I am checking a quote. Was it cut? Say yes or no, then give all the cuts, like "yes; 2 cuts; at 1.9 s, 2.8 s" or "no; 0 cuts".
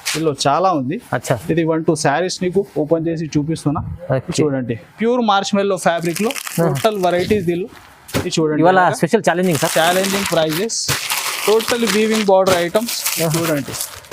no; 0 cuts